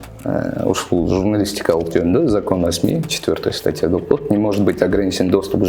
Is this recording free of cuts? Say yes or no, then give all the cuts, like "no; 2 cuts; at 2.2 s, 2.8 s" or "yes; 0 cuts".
yes; 0 cuts